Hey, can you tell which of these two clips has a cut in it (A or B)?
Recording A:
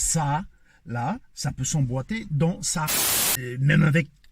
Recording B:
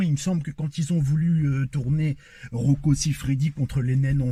A